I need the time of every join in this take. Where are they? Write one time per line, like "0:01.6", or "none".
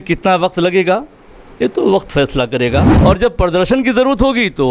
0:02.9